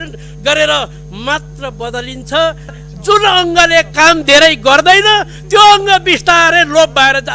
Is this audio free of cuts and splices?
no; 1 cut; at 2.8 s

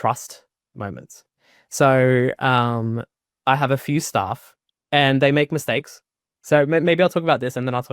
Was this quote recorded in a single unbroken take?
yes; 0 cuts

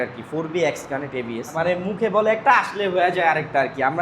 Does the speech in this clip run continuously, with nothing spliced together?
no; 1 cut; at 1.9 s

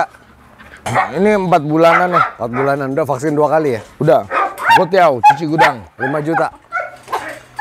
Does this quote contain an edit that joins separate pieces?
yes; 1 cut; at 4.5 s

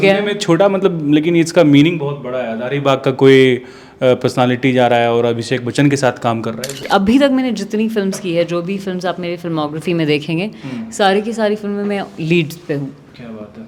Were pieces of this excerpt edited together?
yes; 1 cut; at 6.8 s

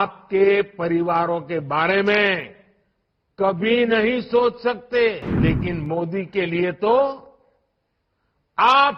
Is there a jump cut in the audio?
yes; 1 cut; at 5.3 s

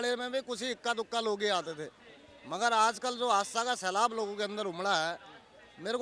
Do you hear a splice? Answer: no; 0 cuts

